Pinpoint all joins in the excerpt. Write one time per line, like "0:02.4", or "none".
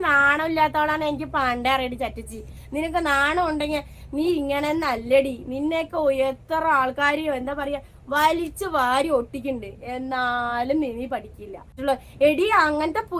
0:11.8